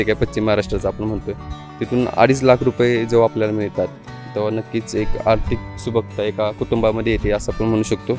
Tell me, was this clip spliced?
no; 0 cuts

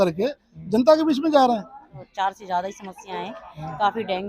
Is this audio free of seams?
no; 1 cut; at 2.0 s

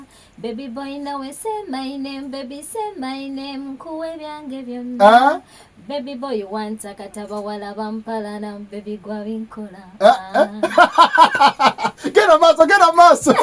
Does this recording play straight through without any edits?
yes; 0 cuts

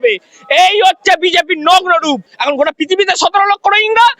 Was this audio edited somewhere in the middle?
yes; 1 cut; at 2.3 s

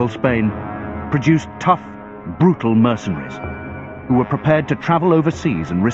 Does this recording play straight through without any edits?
no; 1 cut; at 1.0 s

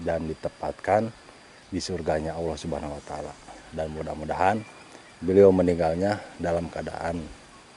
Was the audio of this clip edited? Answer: no; 0 cuts

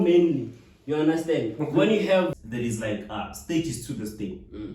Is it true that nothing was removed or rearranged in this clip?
no; 1 cut; at 2.4 s

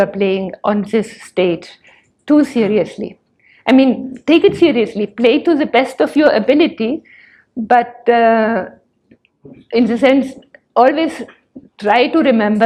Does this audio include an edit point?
no; 0 cuts

